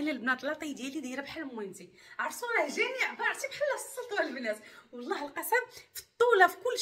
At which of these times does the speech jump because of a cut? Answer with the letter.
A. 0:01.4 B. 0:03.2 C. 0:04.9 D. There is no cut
D